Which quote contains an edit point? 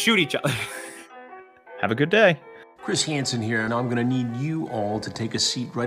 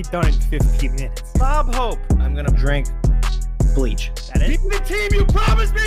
first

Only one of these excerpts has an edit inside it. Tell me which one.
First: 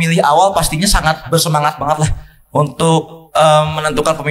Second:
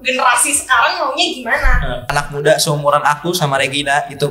second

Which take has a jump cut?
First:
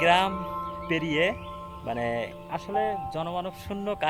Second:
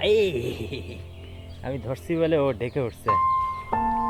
second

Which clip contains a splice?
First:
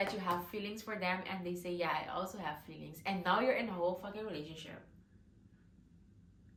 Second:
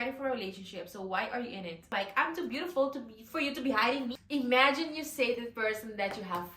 second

